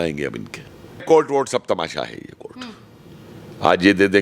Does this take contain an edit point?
yes; 1 cut; at 1.0 s

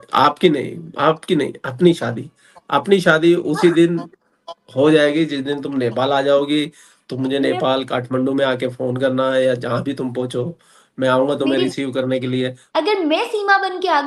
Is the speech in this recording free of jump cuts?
no; 1 cut; at 12.6 s

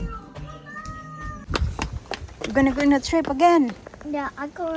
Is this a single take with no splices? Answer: no; 1 cut; at 1.5 s

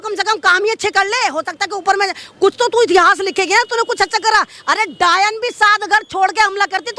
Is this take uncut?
yes; 0 cuts

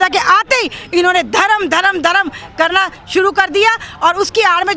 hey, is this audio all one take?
yes; 0 cuts

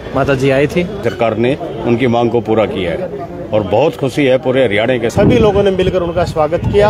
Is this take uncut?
no; 2 cuts; at 1.0 s, 5.1 s

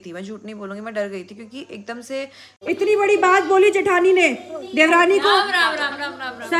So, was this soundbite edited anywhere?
yes; 1 cut; at 2.6 s

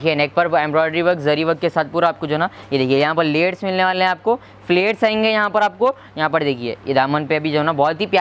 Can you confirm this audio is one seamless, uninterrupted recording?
yes; 0 cuts

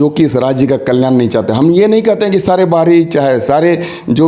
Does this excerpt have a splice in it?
no; 0 cuts

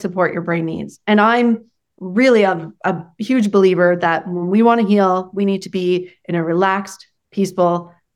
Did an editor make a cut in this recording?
no; 0 cuts

